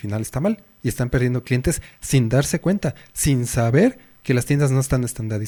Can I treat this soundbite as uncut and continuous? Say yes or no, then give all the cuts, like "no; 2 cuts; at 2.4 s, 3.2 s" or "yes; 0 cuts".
yes; 0 cuts